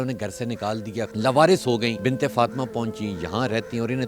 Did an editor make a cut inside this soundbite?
yes; 2 cuts; at 1.1 s, 2.0 s

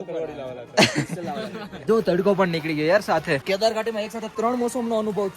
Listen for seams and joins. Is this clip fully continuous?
no; 3 cuts; at 1.8 s, 3.4 s, 4.2 s

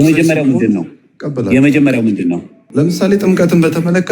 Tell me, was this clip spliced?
yes; 1 cut; at 2.5 s

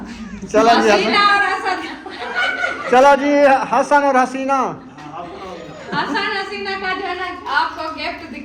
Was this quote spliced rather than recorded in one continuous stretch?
yes; 1 cut; at 5.5 s

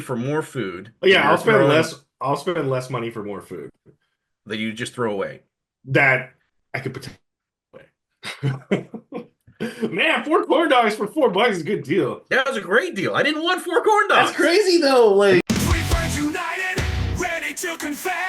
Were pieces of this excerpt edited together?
yes; 1 cut; at 15.4 s

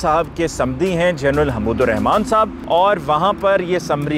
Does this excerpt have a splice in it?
yes; 1 cut; at 2.6 s

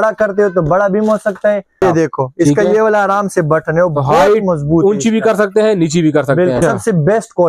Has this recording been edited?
yes; 2 cuts; at 1.8 s, 6.6 s

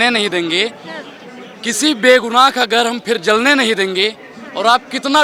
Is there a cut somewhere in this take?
no; 0 cuts

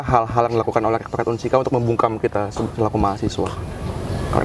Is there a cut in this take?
no; 0 cuts

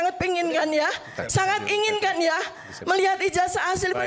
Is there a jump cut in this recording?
no; 0 cuts

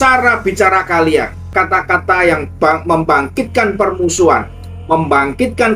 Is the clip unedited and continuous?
no; 1 cut; at 1.4 s

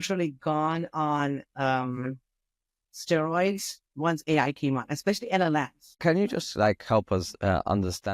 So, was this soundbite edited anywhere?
yes; 1 cut; at 5.8 s

